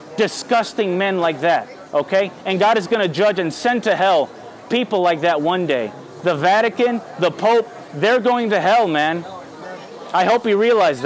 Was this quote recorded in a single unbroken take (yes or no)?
yes